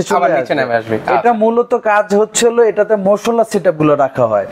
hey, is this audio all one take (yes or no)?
yes